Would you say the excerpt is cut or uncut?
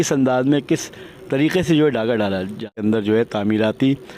cut